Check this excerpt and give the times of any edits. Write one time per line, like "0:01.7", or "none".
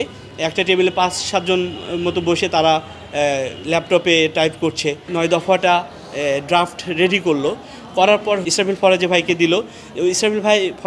0:05.0
0:08.5